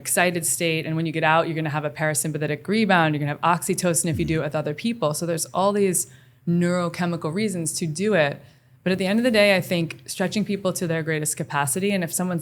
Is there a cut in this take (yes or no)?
no